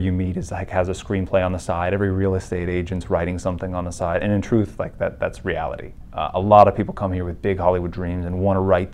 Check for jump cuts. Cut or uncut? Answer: uncut